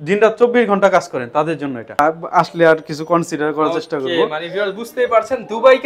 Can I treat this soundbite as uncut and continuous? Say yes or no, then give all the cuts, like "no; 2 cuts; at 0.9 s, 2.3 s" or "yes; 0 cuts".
no; 1 cut; at 2.0 s